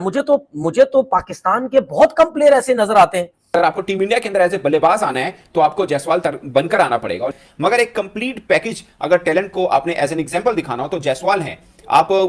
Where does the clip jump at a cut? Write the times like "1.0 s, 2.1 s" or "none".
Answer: 3.5 s